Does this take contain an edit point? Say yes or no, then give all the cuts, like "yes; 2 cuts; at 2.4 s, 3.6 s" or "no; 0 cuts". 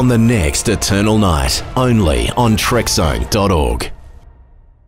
yes; 1 cut; at 3.9 s